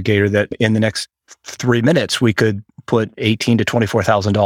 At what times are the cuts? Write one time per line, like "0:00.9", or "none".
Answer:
0:03.1